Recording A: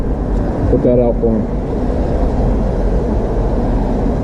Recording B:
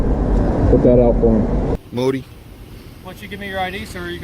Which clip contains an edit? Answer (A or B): B